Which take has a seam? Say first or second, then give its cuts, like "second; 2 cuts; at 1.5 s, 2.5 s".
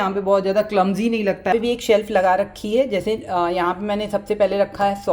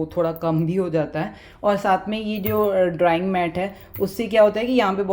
first; 1 cut; at 1.5 s